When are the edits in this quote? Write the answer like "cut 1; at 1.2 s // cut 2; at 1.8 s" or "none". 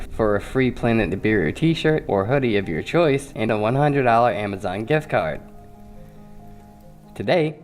cut 1; at 1.5 s

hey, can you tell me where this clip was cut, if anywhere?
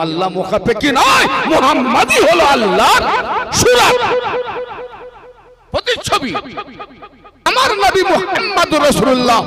cut 1; at 7.5 s

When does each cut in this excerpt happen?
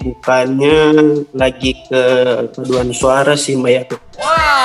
cut 1; at 1.3 s // cut 2; at 3.0 s

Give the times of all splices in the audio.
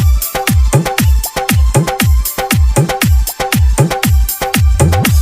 cut 1; at 3.9 s

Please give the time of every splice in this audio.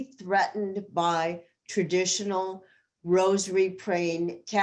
none

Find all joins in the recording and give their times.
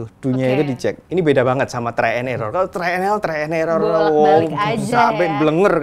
cut 1; at 1.0 s

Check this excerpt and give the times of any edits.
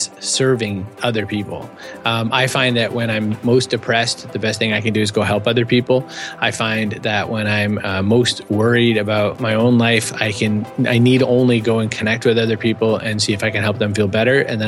cut 1; at 0.9 s

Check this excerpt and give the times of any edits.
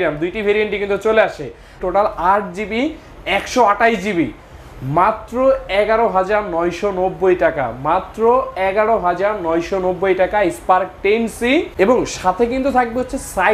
cut 1; at 1.8 s // cut 2; at 11.7 s

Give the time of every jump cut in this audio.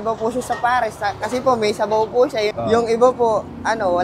cut 1; at 2.5 s

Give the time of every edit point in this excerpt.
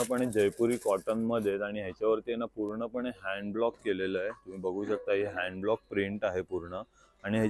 none

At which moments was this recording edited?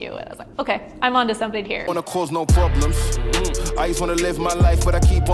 cut 1; at 1.8 s

